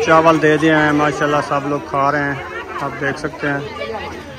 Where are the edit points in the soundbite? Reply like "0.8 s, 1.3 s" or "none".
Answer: none